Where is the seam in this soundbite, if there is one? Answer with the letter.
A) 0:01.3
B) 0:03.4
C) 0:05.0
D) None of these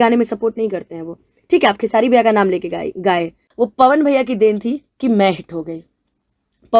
B